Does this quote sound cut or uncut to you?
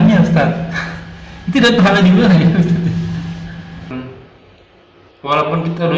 cut